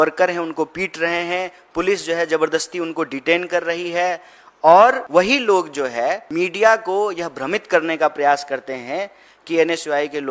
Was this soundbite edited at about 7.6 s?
no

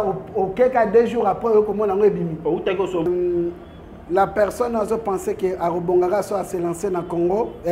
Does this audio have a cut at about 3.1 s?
yes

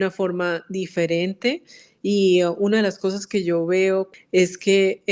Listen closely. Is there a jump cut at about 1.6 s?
no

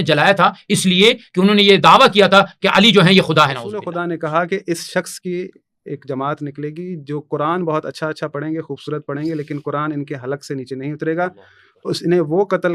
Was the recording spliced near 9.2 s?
no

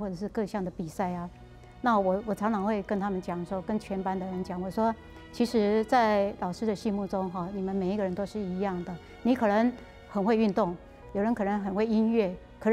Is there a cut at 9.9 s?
yes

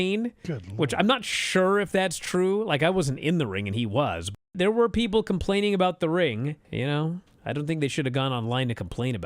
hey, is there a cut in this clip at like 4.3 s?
yes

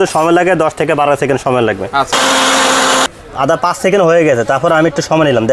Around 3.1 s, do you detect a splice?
yes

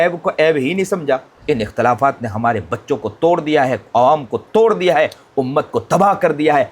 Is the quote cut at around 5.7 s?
no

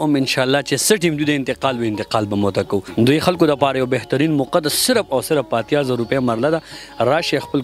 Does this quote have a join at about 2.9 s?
yes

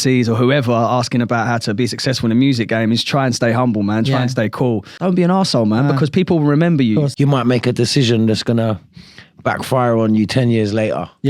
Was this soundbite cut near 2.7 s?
no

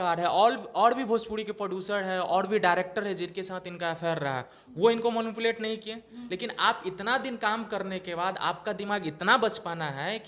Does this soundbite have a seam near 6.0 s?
no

